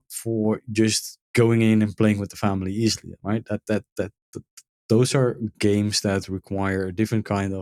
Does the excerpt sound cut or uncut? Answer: uncut